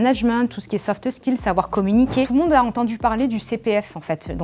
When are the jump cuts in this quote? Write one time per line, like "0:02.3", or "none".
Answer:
0:02.3